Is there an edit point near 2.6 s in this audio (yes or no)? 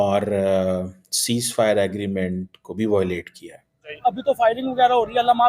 no